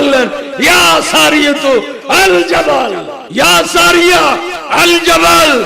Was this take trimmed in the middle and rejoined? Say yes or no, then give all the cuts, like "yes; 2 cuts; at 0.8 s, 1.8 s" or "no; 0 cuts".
yes; 1 cut; at 3.2 s